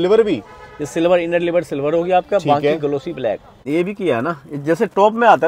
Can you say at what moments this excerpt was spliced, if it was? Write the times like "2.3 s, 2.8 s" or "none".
3.6 s